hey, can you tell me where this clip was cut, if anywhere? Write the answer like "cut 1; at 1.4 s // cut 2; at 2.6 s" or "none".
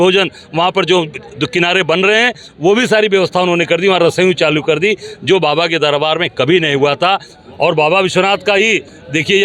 cut 1; at 7.3 s